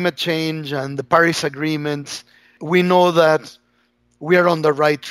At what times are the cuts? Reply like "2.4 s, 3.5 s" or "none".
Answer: 2.6 s